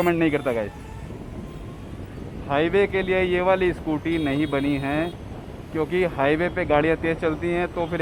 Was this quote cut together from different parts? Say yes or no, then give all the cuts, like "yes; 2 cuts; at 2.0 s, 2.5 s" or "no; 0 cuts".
no; 0 cuts